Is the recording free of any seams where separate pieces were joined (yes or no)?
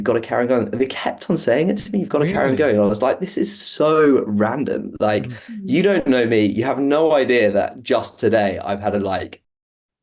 yes